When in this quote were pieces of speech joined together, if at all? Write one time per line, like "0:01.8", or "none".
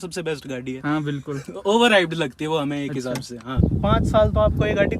0:03.6